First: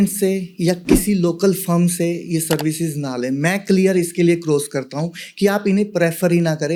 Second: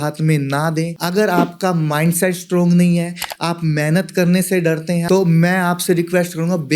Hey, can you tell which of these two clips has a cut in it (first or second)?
second